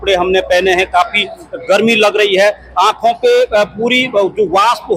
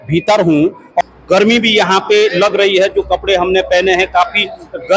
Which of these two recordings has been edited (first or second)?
second